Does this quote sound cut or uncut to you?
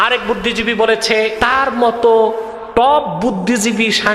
cut